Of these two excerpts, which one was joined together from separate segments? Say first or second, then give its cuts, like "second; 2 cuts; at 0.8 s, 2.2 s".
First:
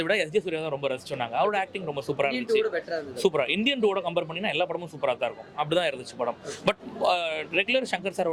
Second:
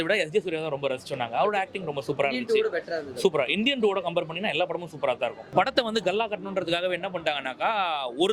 second; 1 cut; at 5.4 s